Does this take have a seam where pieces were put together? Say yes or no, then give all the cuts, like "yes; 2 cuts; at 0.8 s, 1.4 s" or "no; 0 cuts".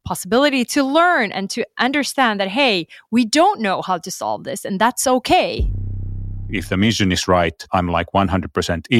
yes; 2 cuts; at 5.9 s, 7.6 s